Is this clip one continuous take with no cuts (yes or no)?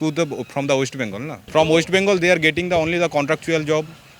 no